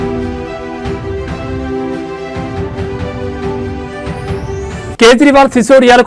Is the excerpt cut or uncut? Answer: uncut